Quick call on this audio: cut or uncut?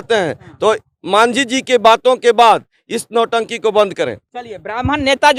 uncut